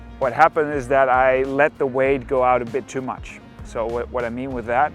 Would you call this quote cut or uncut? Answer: uncut